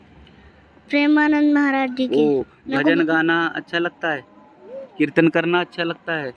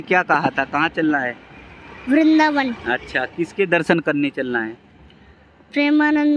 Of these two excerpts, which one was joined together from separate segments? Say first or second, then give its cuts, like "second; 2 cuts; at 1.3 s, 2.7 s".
first; 1 cut; at 2.6 s